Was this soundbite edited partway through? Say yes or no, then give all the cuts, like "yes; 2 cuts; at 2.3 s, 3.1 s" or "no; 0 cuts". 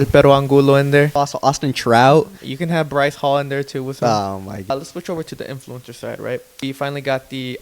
yes; 3 cuts; at 1.1 s, 4.7 s, 6.6 s